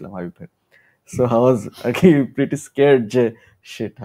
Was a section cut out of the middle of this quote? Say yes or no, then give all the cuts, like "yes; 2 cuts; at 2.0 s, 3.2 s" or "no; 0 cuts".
no; 0 cuts